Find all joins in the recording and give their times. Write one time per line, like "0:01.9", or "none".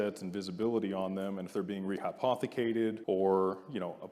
0:03.0